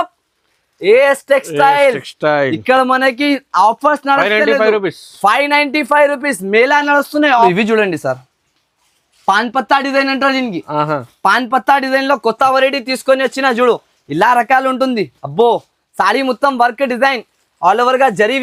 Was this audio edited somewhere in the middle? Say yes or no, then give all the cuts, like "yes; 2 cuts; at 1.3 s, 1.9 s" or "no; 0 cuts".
no; 0 cuts